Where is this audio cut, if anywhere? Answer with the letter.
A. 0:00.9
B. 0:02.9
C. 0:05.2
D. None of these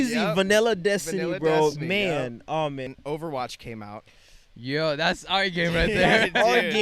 B